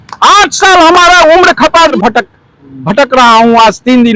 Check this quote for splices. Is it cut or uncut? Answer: cut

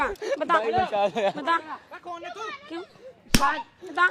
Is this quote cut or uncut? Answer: uncut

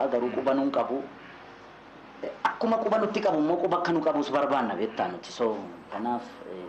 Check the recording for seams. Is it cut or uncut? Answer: uncut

